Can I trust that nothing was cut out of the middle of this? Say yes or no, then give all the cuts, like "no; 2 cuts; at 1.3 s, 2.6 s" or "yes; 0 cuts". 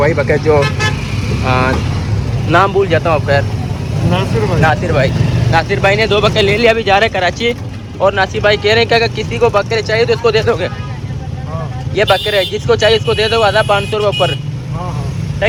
yes; 0 cuts